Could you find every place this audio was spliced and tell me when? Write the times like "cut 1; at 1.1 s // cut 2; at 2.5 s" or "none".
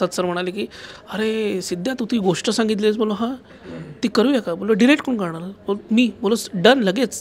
none

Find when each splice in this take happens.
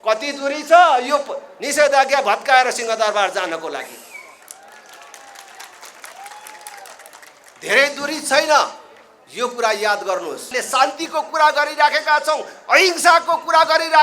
cut 1; at 10.5 s

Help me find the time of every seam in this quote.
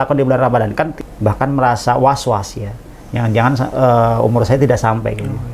cut 1; at 1.0 s

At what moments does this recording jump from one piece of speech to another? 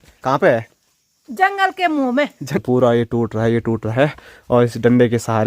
cut 1; at 2.6 s

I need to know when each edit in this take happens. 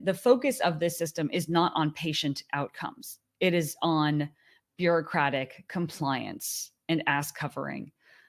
none

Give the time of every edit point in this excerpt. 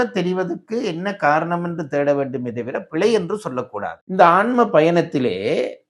cut 1; at 4.0 s

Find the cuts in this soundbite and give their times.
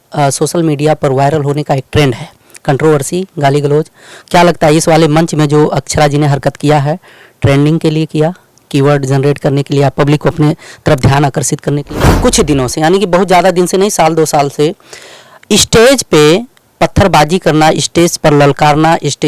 cut 1; at 12.0 s

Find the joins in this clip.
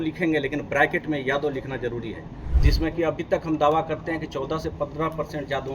cut 1; at 2.5 s

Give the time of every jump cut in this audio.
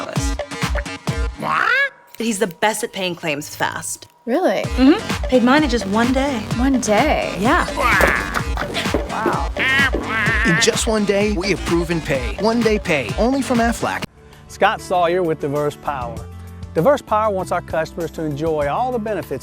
cut 1; at 14.1 s

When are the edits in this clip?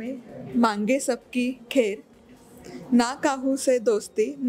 none

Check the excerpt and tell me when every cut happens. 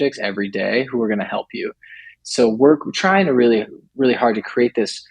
cut 1; at 2.1 s

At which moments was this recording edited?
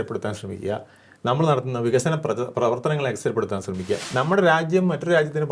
cut 1; at 4.0 s

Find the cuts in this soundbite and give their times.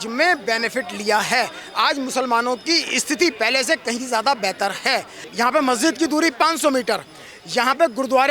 cut 1; at 5.2 s

